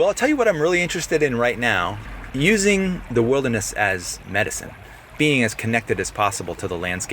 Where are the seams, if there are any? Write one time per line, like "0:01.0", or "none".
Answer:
0:02.0
0:03.0
0:04.8